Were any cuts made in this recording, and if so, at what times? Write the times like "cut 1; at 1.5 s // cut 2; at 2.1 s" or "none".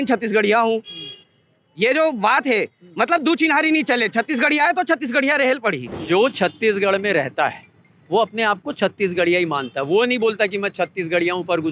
cut 1; at 5.9 s